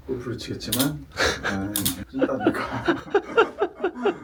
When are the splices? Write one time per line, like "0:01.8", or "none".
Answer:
none